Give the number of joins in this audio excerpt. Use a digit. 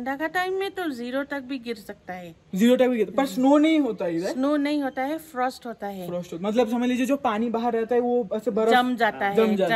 0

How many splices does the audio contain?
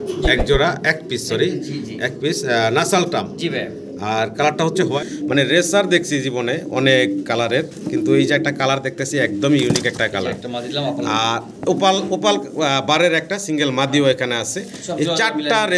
1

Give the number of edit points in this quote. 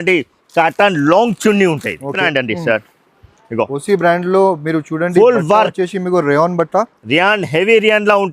1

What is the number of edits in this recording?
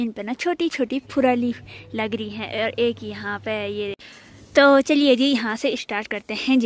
1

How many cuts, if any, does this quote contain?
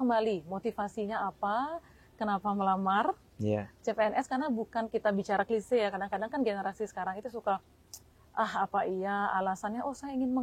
0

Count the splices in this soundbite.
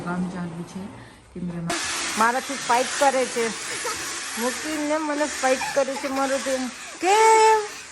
1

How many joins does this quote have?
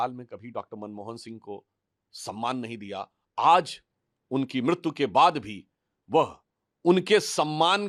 0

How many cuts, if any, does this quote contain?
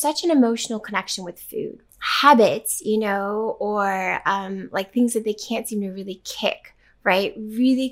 1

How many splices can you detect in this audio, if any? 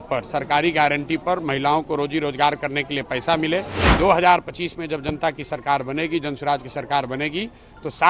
1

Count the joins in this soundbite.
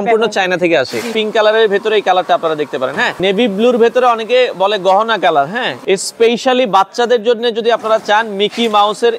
3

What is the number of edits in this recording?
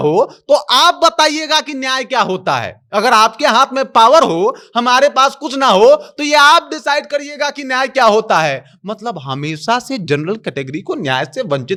0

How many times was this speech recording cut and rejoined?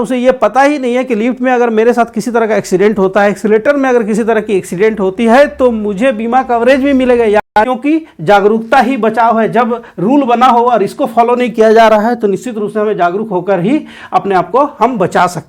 1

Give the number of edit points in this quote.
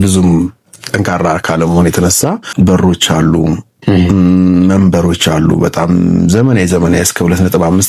1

